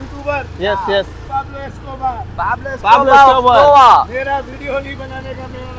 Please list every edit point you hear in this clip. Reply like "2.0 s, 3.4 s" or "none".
1.3 s

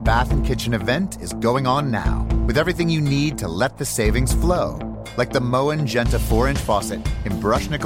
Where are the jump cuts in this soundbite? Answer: none

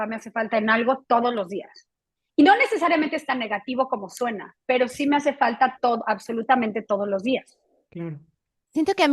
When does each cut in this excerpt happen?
none

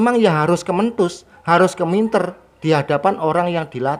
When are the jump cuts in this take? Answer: none

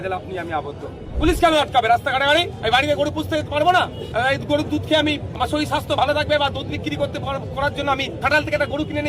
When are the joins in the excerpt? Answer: 1.1 s, 2.5 s, 4.0 s, 5.3 s, 8.1 s

